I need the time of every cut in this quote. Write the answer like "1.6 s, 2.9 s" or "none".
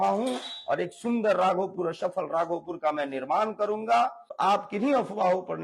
4.2 s